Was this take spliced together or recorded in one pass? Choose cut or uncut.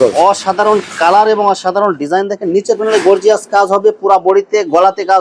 uncut